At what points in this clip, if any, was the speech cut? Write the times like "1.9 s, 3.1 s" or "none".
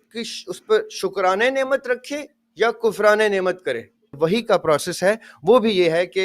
4.1 s